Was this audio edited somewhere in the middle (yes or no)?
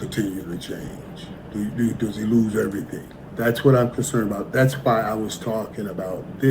yes